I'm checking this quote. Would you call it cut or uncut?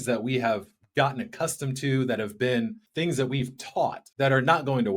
cut